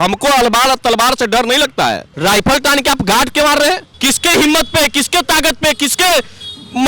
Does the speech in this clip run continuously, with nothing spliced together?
no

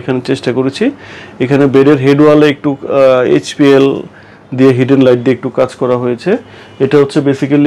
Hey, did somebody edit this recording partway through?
no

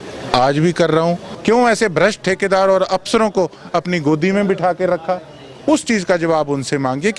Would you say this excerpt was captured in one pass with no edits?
no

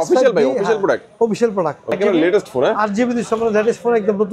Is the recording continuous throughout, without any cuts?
no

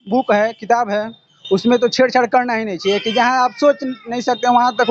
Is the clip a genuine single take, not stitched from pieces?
yes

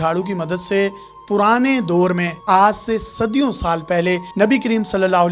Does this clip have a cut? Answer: no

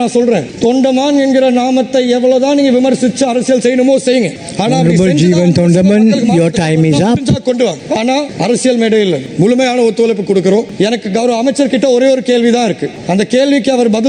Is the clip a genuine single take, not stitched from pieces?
yes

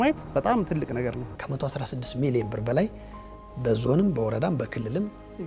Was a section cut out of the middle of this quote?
yes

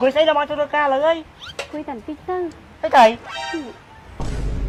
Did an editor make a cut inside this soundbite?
no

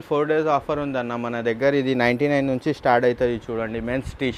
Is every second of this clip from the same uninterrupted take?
yes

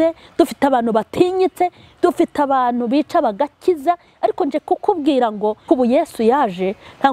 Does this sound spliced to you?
yes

